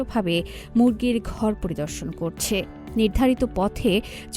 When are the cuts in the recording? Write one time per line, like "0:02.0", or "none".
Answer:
none